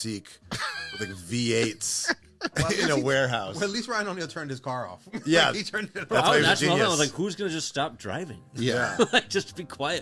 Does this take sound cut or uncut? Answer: uncut